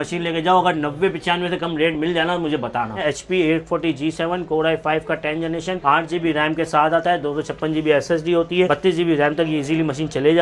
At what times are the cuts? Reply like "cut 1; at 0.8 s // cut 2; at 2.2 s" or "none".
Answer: cut 1; at 3.0 s // cut 2; at 8.7 s